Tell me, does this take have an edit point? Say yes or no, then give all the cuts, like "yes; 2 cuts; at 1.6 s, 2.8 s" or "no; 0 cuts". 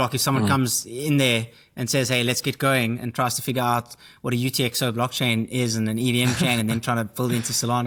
no; 0 cuts